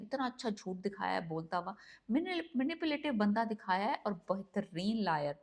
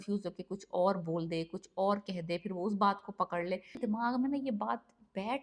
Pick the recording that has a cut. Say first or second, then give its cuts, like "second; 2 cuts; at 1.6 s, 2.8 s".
second; 1 cut; at 3.7 s